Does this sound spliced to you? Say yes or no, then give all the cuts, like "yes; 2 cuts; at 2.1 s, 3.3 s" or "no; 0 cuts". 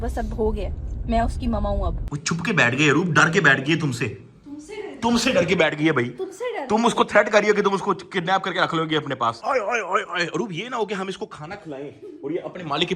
yes; 2 cuts; at 2.1 s, 9.4 s